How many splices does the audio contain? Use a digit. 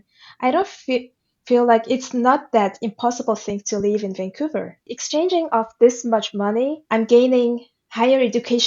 2